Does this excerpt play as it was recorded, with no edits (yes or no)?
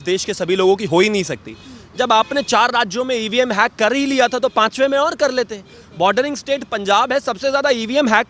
yes